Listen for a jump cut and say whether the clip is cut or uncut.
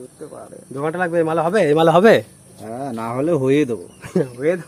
uncut